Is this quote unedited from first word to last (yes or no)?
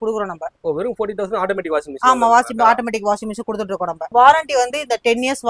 no